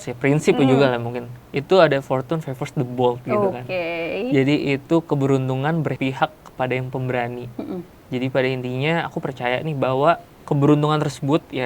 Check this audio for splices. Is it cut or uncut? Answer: cut